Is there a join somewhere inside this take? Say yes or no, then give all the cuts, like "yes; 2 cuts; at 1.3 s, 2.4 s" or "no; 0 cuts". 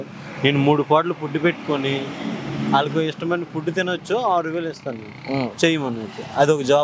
no; 0 cuts